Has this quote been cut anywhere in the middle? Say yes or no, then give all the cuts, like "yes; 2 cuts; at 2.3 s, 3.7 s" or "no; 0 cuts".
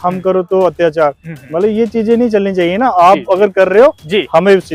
no; 0 cuts